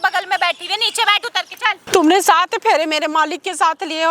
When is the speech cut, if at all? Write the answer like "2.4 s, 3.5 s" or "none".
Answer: 1.8 s